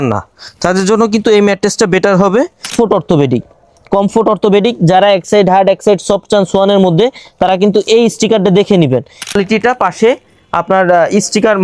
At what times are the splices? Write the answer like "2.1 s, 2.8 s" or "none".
2.7 s, 9.3 s